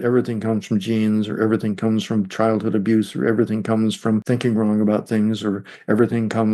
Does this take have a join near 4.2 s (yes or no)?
yes